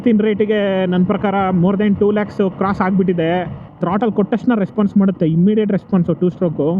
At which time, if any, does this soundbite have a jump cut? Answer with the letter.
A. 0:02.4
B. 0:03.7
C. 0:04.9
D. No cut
B